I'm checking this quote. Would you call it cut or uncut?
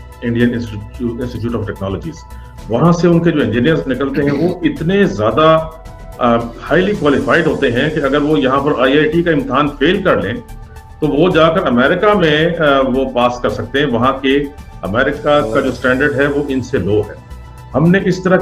uncut